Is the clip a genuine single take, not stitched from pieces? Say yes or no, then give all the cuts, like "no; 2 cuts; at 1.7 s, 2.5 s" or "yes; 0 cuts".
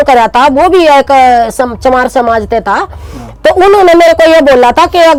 yes; 0 cuts